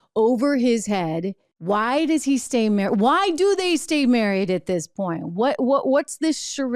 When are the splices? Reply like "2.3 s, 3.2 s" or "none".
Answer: 1.5 s